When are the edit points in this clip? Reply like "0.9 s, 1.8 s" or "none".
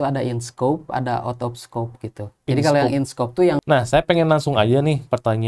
3.6 s